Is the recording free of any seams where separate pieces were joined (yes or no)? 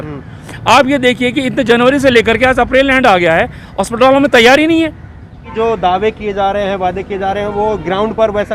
no